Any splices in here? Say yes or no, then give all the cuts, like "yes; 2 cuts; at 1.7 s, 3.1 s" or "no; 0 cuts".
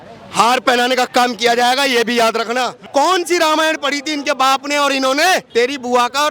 yes; 2 cuts; at 2.8 s, 5.5 s